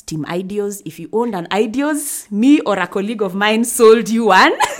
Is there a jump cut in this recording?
no; 0 cuts

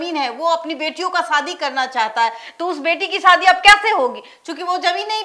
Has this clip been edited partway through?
no; 0 cuts

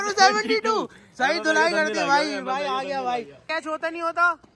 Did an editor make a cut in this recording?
yes; 1 cut; at 3.4 s

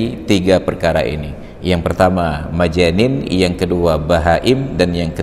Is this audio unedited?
yes; 0 cuts

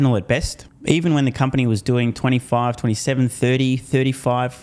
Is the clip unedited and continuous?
yes; 0 cuts

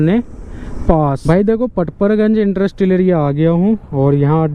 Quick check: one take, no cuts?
no; 1 cut; at 1.2 s

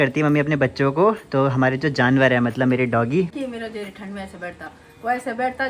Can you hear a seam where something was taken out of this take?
yes; 1 cut; at 3.3 s

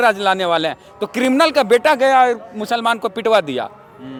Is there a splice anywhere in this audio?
no; 0 cuts

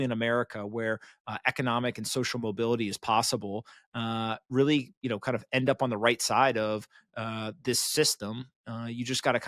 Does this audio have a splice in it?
no; 0 cuts

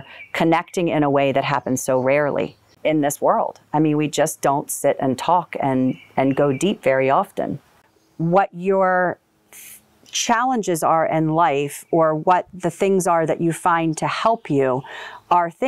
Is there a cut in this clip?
yes; 2 cuts; at 2.7 s, 7.7 s

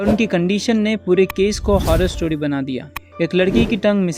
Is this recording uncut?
yes; 0 cuts

